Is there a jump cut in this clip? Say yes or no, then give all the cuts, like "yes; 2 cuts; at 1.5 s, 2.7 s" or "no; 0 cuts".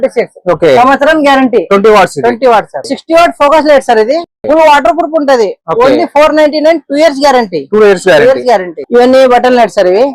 yes; 2 cuts; at 2.9 s, 8.8 s